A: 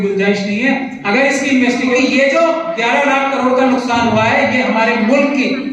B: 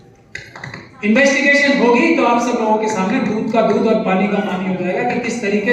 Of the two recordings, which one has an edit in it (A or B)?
A